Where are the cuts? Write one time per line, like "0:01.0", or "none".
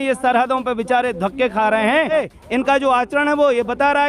0:02.1